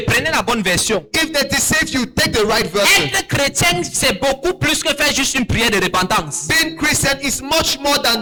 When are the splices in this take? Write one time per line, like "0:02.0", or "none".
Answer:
none